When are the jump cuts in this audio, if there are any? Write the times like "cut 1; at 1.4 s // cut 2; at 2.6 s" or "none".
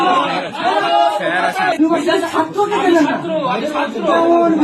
cut 1; at 1.7 s